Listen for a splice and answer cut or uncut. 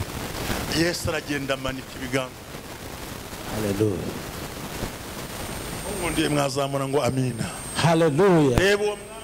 uncut